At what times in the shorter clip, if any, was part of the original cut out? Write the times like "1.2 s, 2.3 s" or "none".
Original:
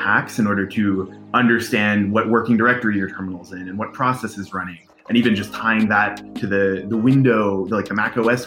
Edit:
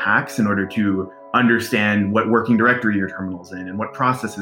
none